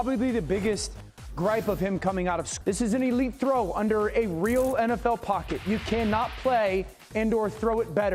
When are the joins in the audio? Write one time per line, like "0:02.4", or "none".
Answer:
0:02.5